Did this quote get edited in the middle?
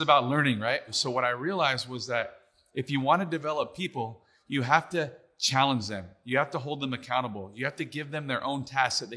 yes; 1 cut; at 0.9 s

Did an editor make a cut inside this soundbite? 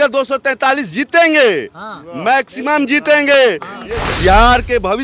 yes; 1 cut; at 3.9 s

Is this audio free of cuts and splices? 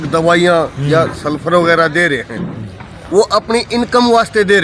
yes; 0 cuts

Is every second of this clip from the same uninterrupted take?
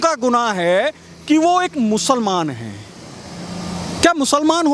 yes; 0 cuts

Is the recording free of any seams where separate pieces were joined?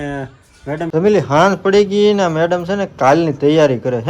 no; 1 cut; at 0.9 s

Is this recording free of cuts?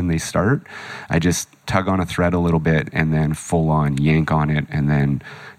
no; 1 cut; at 1.6 s

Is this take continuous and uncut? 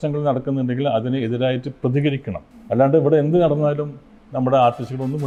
yes; 0 cuts

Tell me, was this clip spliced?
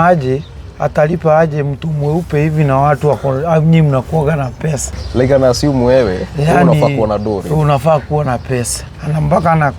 yes; 1 cut; at 5.0 s

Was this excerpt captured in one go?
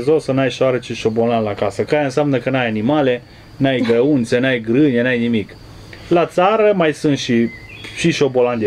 yes; 0 cuts

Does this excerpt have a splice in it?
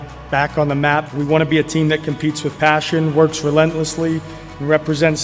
yes; 1 cut; at 1.1 s

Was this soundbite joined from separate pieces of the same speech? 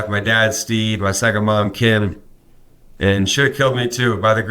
no; 0 cuts

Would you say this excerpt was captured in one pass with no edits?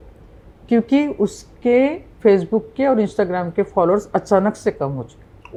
yes; 0 cuts

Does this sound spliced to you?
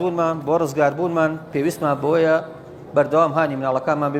no; 0 cuts

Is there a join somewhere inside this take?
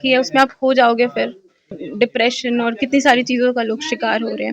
yes; 1 cut; at 1.8 s

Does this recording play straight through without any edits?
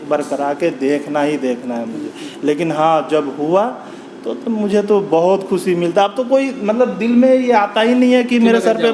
yes; 0 cuts

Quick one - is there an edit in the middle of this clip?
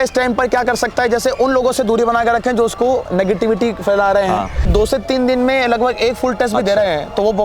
yes; 1 cut; at 4.7 s

